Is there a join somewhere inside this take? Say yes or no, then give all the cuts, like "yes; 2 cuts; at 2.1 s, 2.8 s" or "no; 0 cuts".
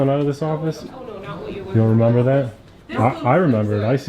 no; 0 cuts